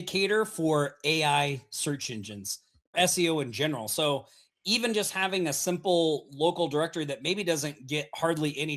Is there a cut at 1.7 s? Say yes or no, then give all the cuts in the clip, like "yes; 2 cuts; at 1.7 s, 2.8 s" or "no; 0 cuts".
no; 1 cut; at 2.9 s